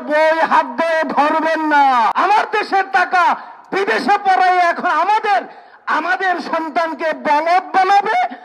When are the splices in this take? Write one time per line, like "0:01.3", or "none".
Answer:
0:02.1